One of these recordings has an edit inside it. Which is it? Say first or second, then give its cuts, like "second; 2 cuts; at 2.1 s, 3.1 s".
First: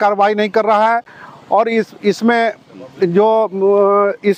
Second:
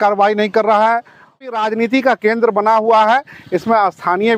second; 1 cut; at 1.5 s